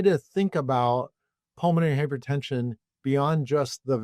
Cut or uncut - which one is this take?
uncut